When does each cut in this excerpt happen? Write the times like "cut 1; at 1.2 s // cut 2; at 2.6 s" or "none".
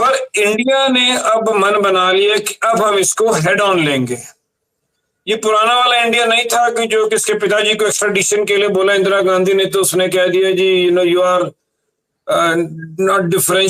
none